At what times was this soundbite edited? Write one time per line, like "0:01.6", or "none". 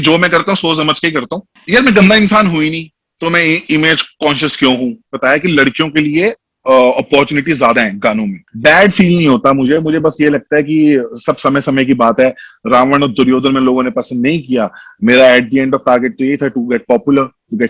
0:01.5
0:05.1
0:08.4